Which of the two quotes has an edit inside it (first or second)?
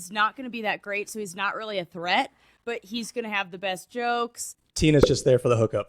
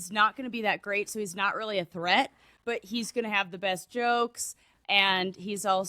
first